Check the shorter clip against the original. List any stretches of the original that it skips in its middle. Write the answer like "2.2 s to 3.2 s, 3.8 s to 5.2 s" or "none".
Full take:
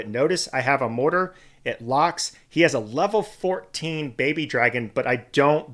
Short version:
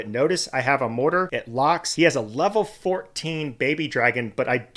1.7 s to 2.3 s